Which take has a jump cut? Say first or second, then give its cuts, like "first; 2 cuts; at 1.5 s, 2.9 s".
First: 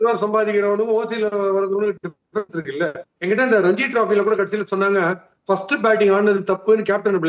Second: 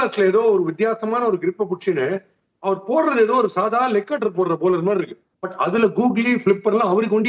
first; 1 cut; at 3.1 s